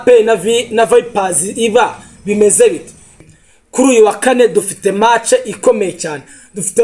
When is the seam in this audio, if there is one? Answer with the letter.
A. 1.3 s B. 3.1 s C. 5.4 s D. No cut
B